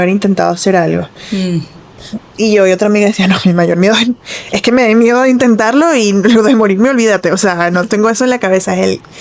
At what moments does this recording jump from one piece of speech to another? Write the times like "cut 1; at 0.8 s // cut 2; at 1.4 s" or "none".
none